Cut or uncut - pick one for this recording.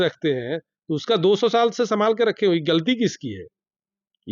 uncut